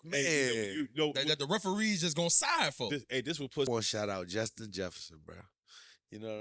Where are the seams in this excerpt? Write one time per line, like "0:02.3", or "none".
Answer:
0:03.7